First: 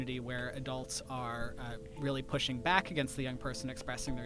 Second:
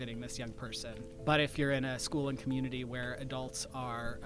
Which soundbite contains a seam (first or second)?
second